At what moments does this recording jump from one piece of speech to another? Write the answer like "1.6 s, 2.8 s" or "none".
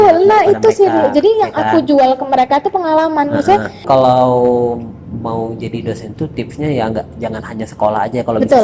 3.8 s